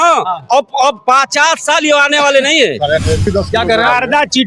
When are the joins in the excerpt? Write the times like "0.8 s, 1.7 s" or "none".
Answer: 3.3 s